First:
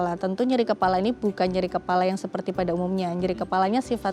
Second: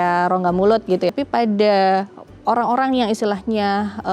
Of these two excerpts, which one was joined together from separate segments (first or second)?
second